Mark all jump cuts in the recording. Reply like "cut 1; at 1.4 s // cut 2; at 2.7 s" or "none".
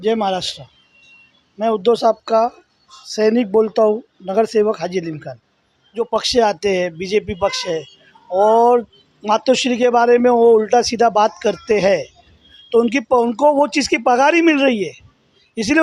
cut 1; at 6.0 s